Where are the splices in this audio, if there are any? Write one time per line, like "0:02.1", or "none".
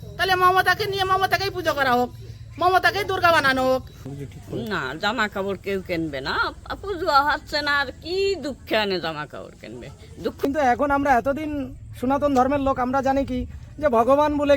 0:03.9
0:10.4